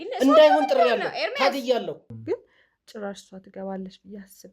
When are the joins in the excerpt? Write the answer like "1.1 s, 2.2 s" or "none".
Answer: 2.0 s